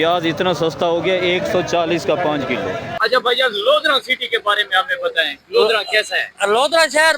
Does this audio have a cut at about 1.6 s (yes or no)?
no